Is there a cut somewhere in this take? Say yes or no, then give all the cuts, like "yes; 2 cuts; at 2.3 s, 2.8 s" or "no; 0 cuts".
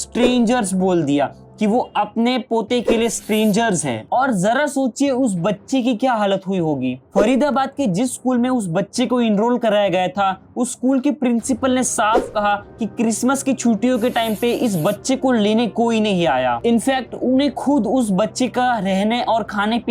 no; 0 cuts